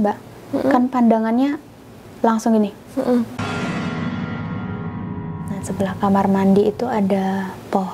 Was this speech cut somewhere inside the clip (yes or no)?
yes